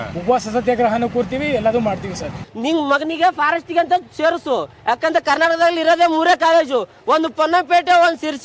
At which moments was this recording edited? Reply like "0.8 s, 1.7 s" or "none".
2.4 s

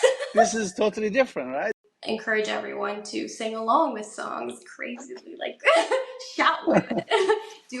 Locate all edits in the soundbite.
1.8 s

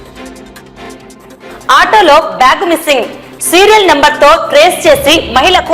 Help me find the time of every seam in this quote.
1.2 s

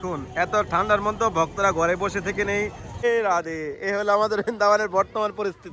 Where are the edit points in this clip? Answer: 3.0 s

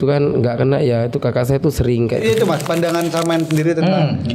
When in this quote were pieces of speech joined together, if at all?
2.2 s

